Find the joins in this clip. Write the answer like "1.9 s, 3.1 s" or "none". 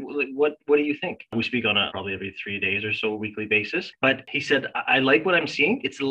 1.6 s, 4.3 s